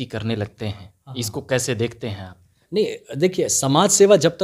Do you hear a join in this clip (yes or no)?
no